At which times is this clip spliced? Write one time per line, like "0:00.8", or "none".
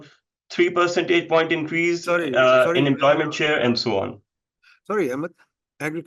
none

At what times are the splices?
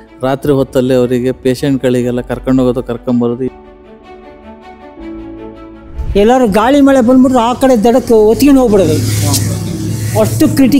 0:03.5
0:06.0

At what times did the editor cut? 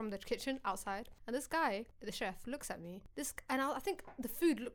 0:01.1
0:01.9
0:03.0

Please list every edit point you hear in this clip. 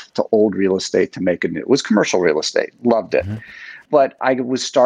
none

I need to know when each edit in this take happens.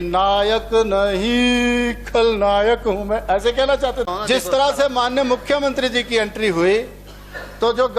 0:04.1

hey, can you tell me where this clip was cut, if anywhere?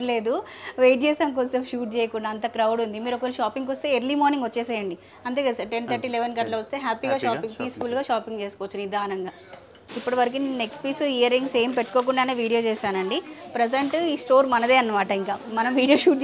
none

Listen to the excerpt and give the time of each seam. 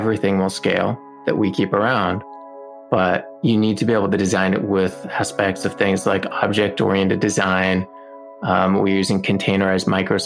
none

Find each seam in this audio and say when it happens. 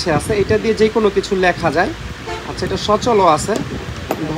none

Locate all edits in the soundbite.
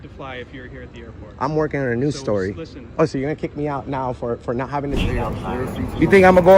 0:05.0

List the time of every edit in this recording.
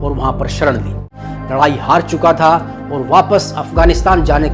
0:01.1

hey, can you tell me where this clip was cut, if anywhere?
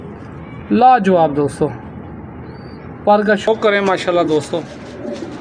0:03.5

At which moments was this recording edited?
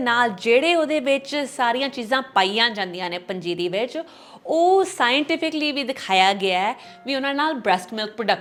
none

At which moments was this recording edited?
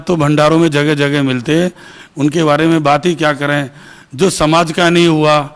none

